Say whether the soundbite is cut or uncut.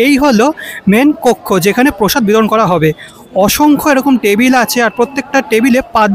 uncut